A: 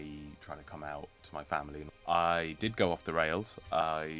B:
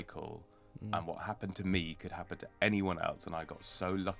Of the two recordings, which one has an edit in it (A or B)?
A